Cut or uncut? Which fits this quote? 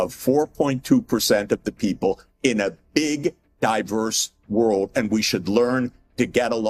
uncut